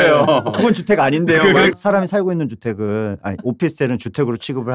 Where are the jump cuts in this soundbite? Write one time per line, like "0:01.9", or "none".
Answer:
0:01.7